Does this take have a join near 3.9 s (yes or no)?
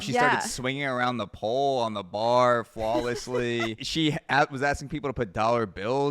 yes